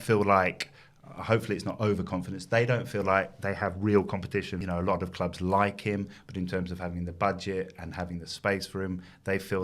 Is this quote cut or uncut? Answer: cut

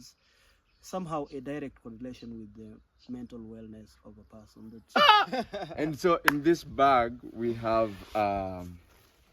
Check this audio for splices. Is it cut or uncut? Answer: cut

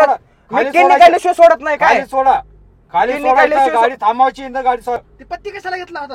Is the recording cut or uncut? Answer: cut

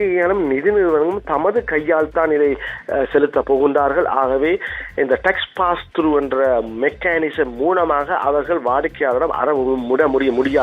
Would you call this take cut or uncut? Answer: uncut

